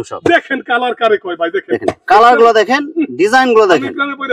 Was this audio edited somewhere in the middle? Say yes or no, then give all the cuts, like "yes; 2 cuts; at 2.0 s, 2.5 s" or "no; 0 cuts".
no; 0 cuts